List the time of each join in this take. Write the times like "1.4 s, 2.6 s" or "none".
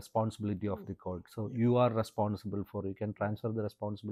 none